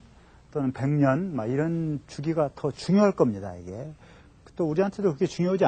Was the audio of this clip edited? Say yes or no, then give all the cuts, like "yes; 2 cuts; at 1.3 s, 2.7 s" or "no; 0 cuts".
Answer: no; 0 cuts